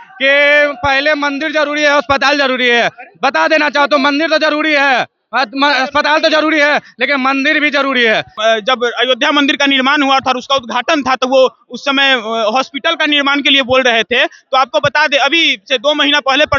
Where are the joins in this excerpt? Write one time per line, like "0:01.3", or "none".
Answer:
0:08.3